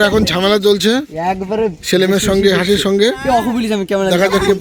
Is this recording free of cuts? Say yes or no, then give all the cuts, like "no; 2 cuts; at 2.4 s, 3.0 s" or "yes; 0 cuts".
yes; 0 cuts